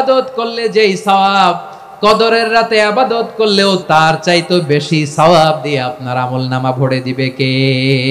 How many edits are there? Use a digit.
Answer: 1